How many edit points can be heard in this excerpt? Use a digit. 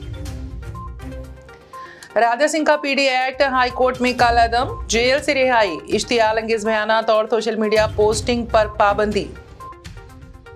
1